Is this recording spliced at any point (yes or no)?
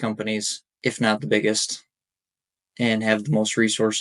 no